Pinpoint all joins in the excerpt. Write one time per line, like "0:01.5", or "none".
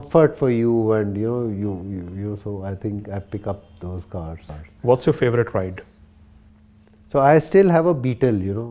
0:04.4